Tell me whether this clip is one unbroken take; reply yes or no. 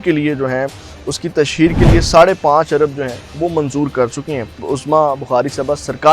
no